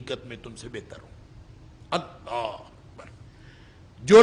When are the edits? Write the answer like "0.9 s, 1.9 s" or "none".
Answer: none